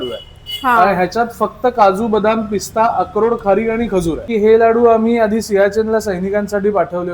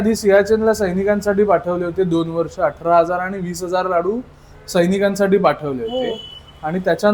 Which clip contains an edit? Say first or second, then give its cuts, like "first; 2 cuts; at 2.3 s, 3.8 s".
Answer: first; 1 cut; at 4.2 s